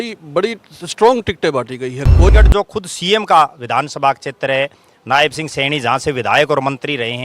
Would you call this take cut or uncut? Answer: cut